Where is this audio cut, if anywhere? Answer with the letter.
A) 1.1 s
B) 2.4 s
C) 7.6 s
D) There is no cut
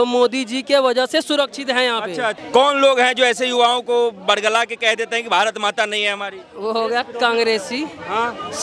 B